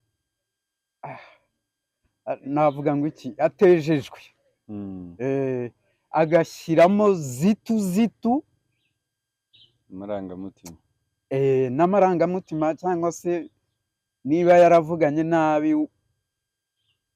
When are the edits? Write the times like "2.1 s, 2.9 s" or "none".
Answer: none